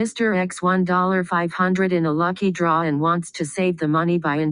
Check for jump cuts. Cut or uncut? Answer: uncut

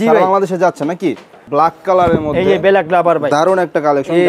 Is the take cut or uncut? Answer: cut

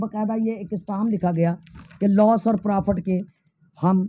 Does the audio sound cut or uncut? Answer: uncut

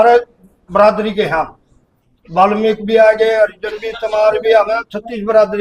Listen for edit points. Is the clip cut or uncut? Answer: uncut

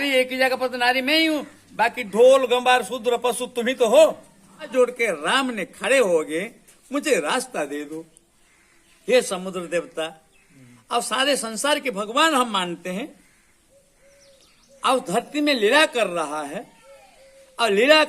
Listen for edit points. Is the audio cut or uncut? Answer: cut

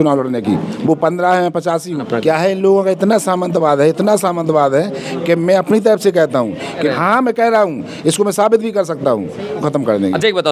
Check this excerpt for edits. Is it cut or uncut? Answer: cut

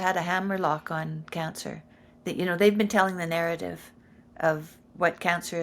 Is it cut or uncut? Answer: uncut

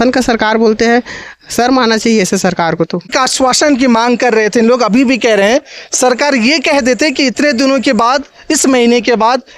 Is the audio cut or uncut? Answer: cut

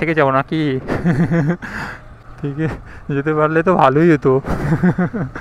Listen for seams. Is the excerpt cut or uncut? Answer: uncut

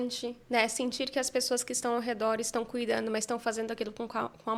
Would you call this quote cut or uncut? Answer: uncut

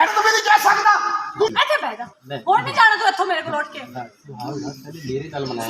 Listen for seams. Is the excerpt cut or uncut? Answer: cut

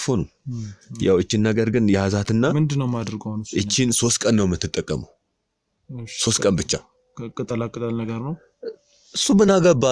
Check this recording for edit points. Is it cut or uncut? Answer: uncut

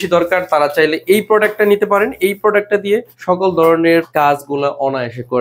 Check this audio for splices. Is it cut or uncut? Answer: cut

